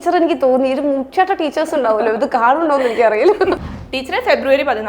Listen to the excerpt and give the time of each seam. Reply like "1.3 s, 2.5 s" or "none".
3.6 s